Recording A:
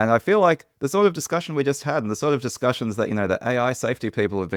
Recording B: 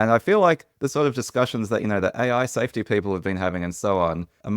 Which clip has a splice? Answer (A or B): B